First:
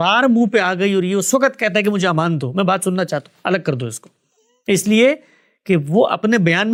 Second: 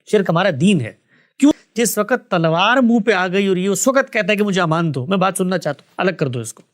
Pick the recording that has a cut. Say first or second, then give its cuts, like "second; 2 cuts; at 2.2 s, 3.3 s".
second; 1 cut; at 1.5 s